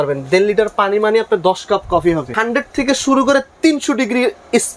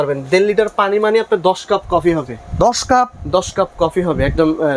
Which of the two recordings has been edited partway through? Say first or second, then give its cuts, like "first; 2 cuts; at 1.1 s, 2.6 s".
first; 1 cut; at 2.4 s